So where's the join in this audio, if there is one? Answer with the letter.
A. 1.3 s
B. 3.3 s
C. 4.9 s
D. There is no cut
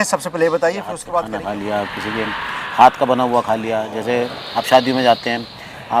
A